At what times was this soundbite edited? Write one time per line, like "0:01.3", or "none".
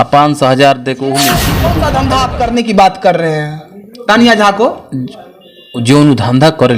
0:01.4